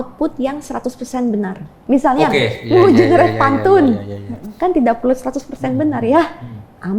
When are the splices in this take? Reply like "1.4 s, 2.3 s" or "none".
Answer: 1.7 s